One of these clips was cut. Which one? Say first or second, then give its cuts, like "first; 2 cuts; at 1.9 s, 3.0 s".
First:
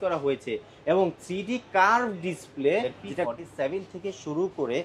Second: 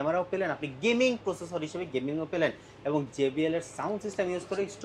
first; 1 cut; at 3.3 s